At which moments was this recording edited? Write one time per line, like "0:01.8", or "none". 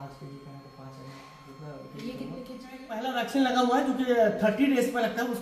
0:03.0